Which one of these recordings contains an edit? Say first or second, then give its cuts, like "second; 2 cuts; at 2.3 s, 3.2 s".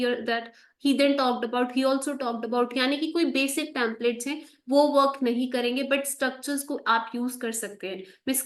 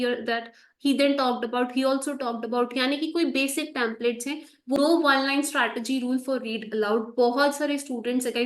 second; 1 cut; at 4.8 s